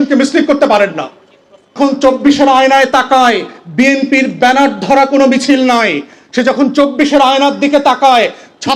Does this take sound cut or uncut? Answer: cut